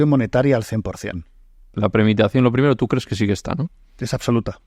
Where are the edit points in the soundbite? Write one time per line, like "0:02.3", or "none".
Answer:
0:01.8

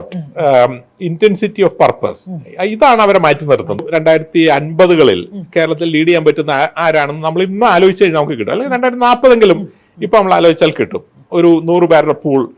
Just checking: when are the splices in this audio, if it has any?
0:03.8

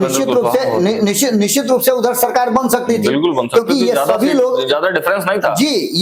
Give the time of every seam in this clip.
none

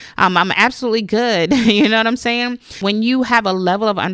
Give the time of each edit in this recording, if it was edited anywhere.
0:02.7

